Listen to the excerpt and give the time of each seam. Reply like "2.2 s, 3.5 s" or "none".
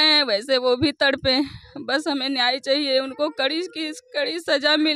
none